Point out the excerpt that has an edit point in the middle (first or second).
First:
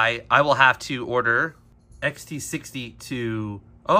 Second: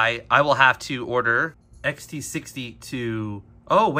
second